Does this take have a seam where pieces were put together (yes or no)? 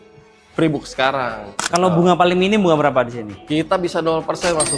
yes